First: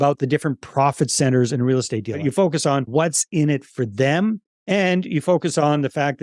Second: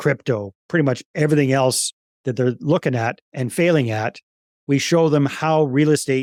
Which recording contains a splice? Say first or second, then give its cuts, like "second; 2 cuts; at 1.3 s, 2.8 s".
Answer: first; 1 cut; at 2.2 s